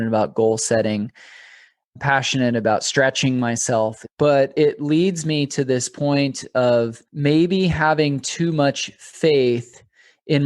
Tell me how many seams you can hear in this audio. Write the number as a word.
three